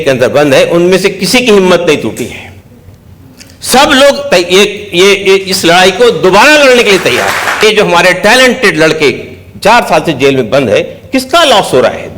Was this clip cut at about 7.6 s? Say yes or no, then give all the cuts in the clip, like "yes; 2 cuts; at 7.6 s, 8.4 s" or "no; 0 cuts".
yes; 1 cut; at 7.6 s